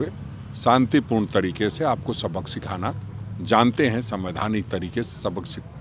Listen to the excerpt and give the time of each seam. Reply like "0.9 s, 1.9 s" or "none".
none